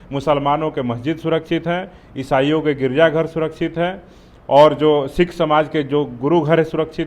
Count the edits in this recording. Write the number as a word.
zero